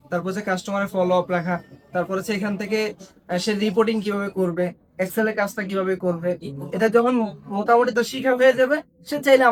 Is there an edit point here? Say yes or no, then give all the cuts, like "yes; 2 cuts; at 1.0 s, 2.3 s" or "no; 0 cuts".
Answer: no; 0 cuts